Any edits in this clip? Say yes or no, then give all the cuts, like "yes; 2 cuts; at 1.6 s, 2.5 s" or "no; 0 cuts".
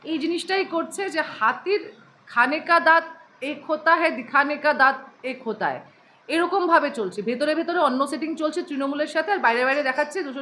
no; 0 cuts